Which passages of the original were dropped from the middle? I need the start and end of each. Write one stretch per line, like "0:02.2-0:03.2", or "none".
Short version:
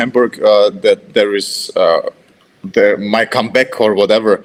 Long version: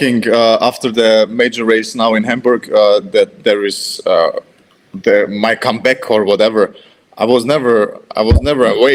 none